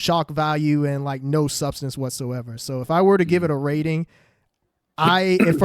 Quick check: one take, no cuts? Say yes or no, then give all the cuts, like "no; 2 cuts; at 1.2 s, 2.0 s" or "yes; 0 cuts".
yes; 0 cuts